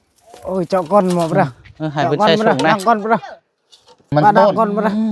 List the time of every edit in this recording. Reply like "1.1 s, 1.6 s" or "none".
none